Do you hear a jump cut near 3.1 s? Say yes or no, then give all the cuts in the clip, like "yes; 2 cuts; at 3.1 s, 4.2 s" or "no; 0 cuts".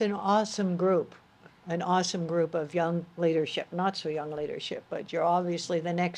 no; 0 cuts